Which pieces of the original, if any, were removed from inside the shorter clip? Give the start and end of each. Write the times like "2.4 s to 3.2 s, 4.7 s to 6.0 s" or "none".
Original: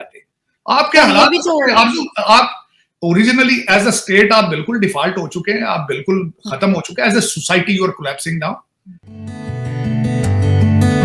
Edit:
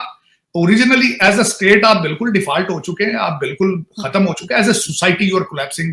none